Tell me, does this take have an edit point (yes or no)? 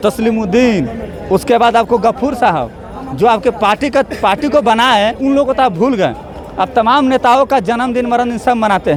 no